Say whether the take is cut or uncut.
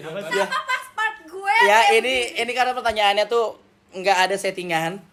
uncut